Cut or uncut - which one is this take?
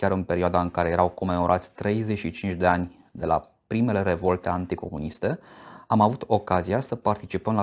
uncut